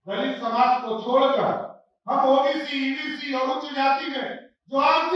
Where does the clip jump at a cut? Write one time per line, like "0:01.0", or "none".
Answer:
none